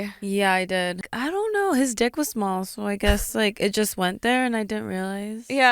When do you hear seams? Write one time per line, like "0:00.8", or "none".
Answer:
0:01.0